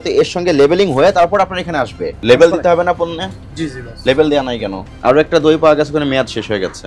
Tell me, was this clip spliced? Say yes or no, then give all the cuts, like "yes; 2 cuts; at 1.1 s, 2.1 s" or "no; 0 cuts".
yes; 2 cuts; at 2.1 s, 4.9 s